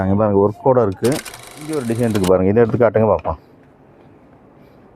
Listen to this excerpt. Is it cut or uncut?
cut